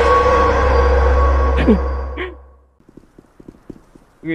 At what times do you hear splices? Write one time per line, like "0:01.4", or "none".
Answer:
0:01.3
0:02.8